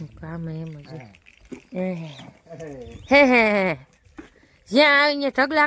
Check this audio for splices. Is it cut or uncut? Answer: uncut